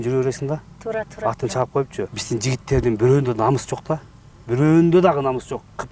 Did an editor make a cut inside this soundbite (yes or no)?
yes